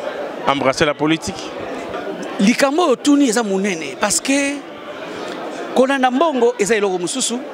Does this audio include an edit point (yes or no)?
yes